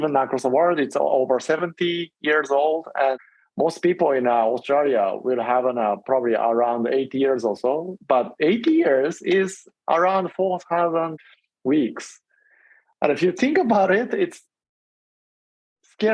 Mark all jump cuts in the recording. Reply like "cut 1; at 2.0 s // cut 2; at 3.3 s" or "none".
cut 1; at 3.2 s // cut 2; at 11.2 s